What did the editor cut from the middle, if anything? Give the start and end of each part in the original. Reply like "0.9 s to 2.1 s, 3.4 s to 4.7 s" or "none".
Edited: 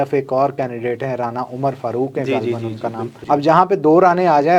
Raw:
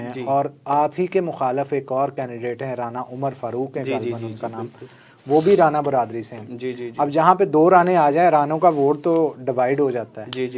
4.7 s to 6.8 s